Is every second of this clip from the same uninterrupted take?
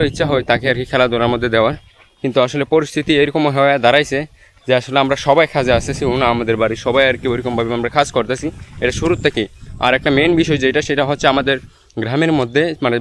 yes; 0 cuts

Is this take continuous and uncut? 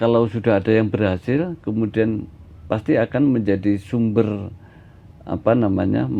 yes; 0 cuts

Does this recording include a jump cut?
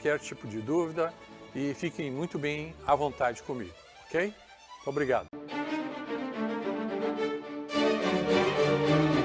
yes; 1 cut; at 5.2 s

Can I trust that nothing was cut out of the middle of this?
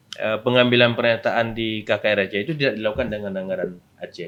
yes; 0 cuts

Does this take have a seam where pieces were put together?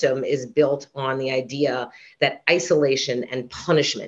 no; 0 cuts

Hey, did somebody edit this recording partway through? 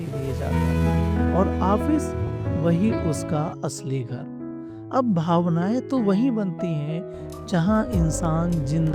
no; 0 cuts

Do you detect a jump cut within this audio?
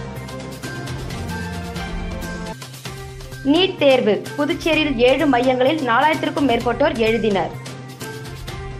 no; 0 cuts

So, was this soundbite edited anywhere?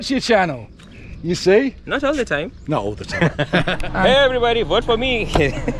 yes; 1 cut; at 3.7 s

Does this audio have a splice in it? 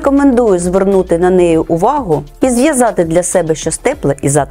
no; 0 cuts

